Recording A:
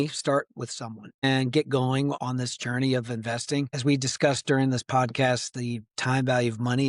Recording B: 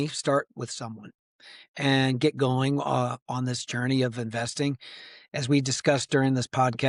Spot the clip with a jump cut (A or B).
A